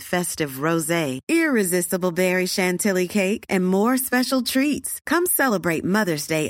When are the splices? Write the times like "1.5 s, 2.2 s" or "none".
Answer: none